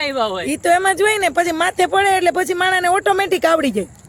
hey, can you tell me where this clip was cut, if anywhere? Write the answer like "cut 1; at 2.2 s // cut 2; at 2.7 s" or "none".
none